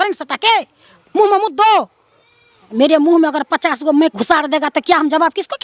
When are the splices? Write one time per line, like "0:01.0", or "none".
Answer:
0:02.6